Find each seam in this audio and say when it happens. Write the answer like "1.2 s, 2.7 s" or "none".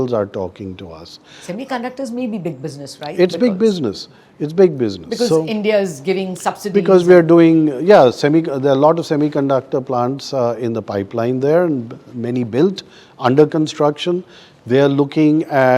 none